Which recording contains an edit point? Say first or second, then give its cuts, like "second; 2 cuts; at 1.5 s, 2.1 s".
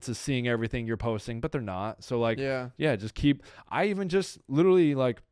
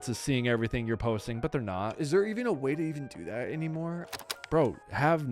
second; 2 cuts; at 1.9 s, 4.2 s